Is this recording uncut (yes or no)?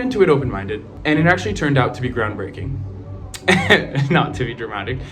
no